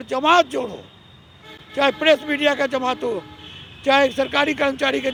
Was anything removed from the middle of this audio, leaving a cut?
no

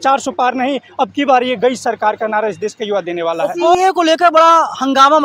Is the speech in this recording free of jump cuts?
no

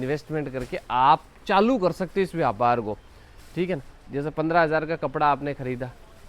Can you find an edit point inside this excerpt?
no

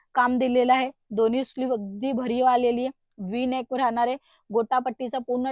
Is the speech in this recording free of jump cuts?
yes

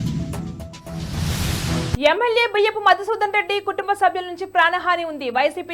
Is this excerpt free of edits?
no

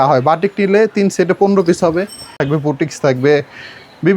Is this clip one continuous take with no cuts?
no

